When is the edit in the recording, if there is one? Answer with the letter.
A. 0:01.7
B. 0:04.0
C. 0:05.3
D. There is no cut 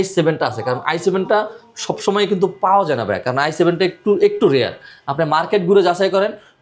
D